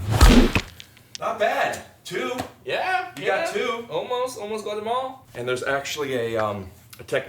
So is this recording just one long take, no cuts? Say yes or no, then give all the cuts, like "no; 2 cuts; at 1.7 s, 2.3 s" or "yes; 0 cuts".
no; 1 cut; at 5.3 s